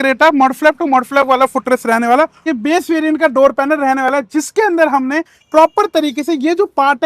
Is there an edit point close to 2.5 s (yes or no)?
yes